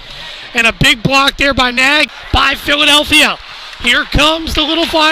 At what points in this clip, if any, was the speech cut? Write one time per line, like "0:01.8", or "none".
0:02.2

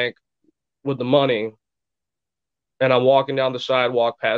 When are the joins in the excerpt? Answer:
none

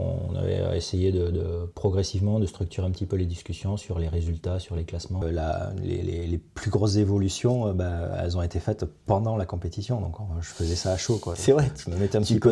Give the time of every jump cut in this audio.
0:05.2

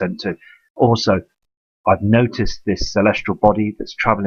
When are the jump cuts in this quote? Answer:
0:02.3

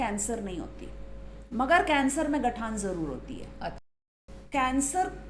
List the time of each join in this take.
0:04.1

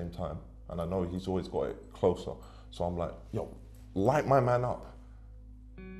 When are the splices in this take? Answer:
none

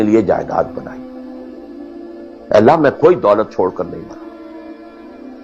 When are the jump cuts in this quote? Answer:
none

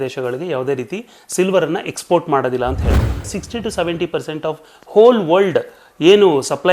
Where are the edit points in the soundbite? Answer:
0:03.2

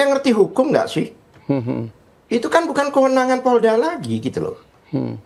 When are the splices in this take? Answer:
none

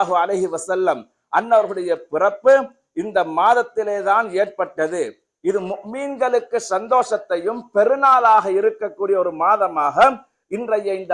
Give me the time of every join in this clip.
none

